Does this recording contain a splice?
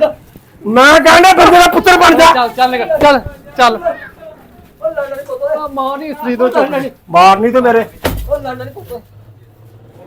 no; 0 cuts

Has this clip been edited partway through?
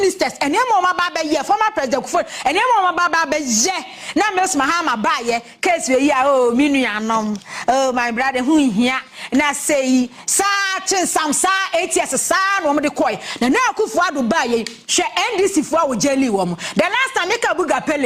no; 0 cuts

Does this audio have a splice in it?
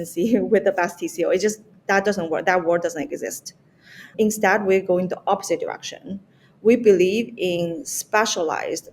yes; 1 cut; at 4.1 s

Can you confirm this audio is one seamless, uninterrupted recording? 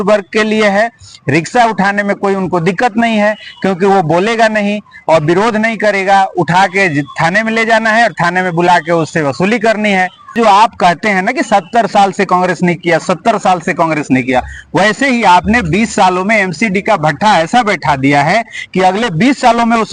no; 1 cut; at 10.3 s

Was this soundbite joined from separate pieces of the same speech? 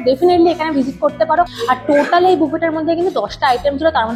yes; 1 cut; at 1.5 s

